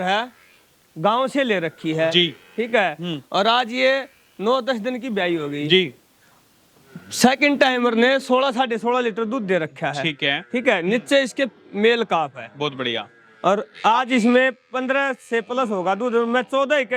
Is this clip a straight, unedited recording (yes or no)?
yes